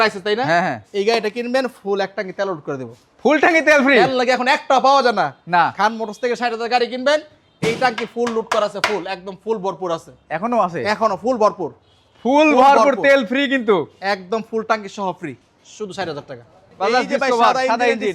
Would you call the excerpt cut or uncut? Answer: uncut